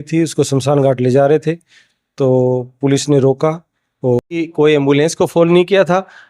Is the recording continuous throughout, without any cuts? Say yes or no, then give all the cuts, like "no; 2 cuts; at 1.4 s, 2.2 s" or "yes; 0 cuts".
no; 1 cut; at 4.4 s